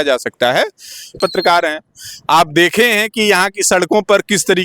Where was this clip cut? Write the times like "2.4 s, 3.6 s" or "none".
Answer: 1.1 s